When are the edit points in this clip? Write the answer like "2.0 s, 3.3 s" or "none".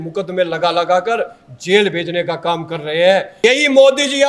3.3 s